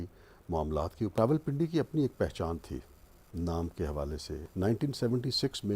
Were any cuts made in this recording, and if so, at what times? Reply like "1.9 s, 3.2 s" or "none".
1.2 s, 4.4 s